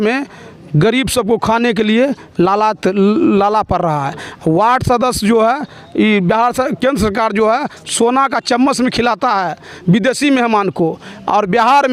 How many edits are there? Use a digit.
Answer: 0